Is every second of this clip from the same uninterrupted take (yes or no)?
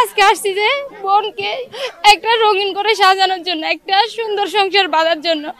no